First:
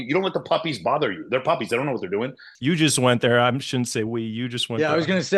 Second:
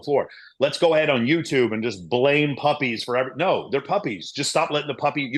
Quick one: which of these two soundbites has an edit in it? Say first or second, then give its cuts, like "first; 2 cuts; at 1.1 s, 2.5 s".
first; 1 cut; at 2.5 s